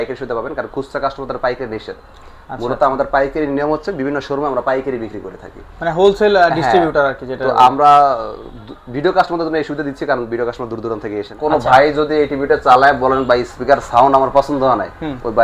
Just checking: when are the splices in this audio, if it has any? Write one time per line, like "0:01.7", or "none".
0:11.3